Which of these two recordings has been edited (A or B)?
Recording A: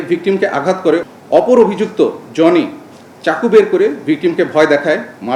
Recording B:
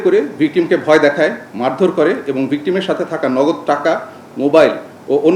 A